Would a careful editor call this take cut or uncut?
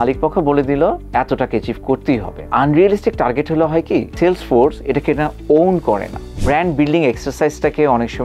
cut